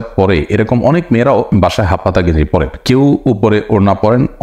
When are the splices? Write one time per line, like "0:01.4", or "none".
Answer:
none

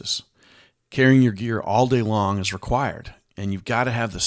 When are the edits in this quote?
none

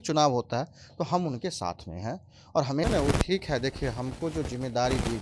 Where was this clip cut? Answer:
0:02.8

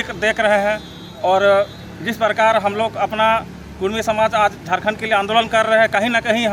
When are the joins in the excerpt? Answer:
none

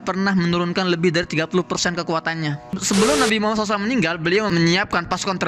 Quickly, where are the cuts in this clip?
0:02.7
0:04.5

